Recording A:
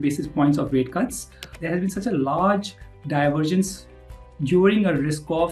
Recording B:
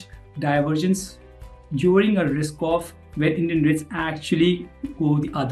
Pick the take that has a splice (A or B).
A